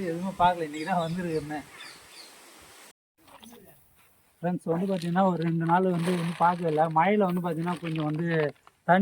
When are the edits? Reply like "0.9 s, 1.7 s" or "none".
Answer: 2.9 s